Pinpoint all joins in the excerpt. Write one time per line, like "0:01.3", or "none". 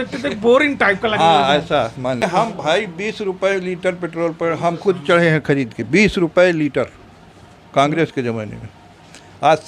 0:02.2